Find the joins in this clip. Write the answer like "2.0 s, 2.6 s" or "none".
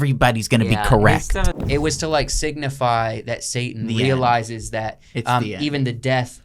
1.6 s